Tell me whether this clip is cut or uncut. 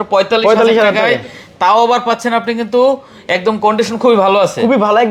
uncut